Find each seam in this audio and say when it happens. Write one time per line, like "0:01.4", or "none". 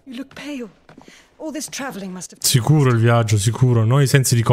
none

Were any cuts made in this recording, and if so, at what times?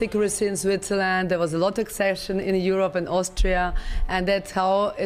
none

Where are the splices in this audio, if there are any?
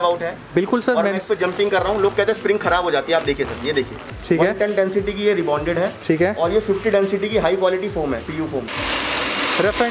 0:04.1
0:08.7

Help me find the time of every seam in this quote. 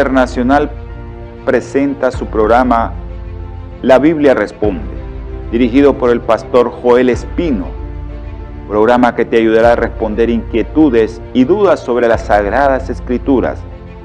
0:01.7

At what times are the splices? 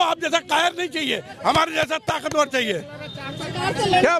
none

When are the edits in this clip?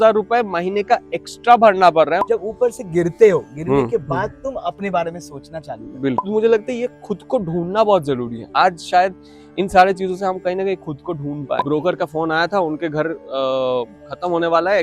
0:02.2
0:06.2
0:11.6

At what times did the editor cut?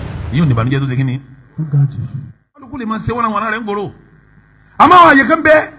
0:02.7

